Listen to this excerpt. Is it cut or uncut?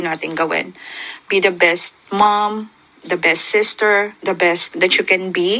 cut